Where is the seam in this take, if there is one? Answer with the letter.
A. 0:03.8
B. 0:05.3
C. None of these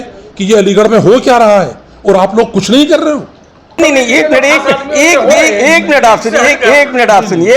A